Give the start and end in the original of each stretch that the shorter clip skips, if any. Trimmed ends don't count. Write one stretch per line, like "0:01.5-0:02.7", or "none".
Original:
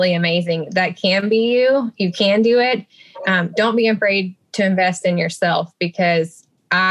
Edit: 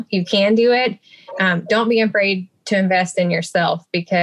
none

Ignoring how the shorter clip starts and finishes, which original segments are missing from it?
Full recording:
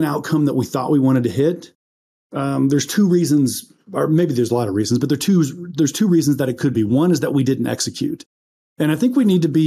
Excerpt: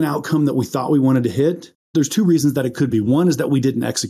0:01.8-0:05.6

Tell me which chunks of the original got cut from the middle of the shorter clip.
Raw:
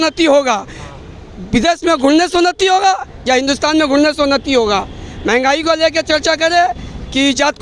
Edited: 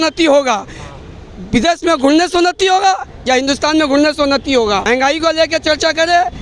0:04.8-0:05.3

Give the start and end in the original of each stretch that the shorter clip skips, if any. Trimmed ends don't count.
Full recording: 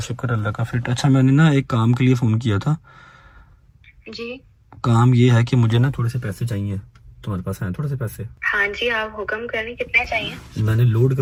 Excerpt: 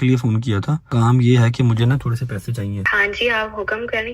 0:02.8-0:04.8
0:06.8-0:08.4

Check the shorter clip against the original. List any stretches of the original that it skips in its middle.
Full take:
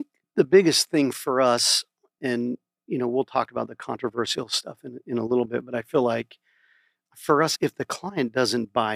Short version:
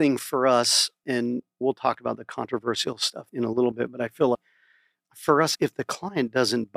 0:02.1-0:02.7
0:04.7-0:04.9
0:06.1-0:06.4

